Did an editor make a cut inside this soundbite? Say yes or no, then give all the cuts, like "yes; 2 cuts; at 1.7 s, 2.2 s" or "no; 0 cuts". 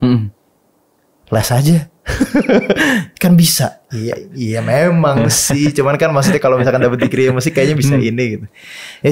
no; 0 cuts